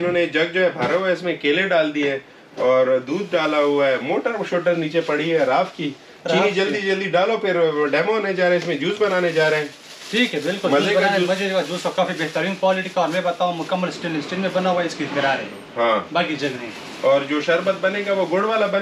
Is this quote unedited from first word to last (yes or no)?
yes